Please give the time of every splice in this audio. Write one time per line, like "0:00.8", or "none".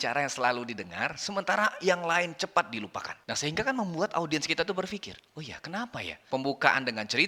0:06.2